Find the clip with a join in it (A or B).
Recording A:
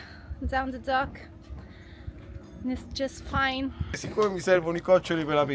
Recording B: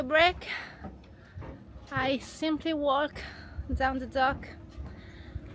A